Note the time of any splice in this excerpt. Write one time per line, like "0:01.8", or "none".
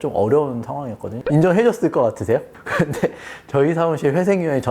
0:01.2
0:02.6